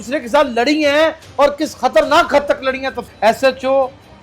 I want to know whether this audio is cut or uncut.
cut